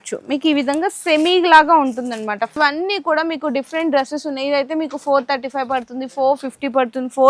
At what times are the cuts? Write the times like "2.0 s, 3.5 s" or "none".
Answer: 2.6 s

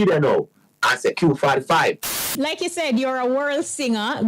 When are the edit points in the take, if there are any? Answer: 2.4 s

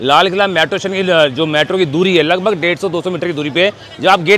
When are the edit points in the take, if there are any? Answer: none

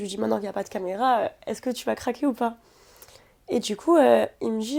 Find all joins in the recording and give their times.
none

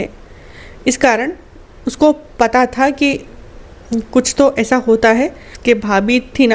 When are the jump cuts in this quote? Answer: 5.5 s

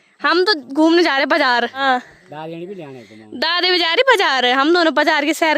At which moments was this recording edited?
1.8 s

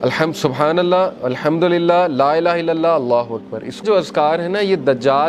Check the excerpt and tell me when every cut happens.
3.8 s

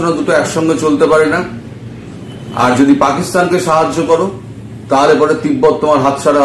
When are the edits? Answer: none

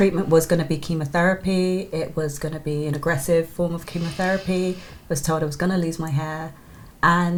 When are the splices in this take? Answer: none

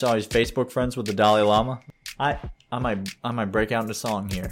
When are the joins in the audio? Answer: 1.8 s

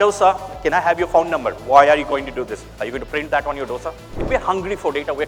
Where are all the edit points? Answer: 4.2 s

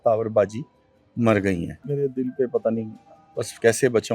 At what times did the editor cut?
1.8 s

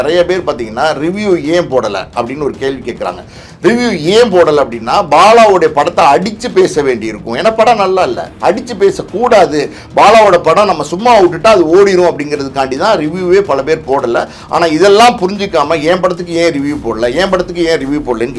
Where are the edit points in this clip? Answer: none

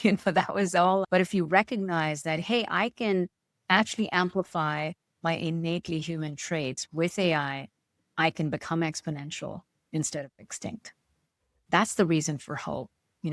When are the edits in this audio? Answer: 1.1 s, 11.5 s

